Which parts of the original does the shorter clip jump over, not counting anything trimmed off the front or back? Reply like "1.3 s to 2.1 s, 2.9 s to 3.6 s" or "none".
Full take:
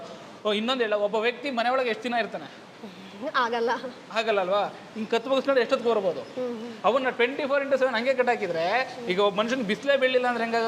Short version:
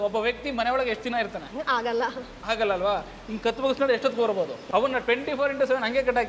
2.4 s to 3.1 s, 6.3 s to 6.7 s